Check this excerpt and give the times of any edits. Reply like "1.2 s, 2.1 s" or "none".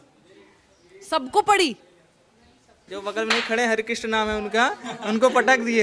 2.8 s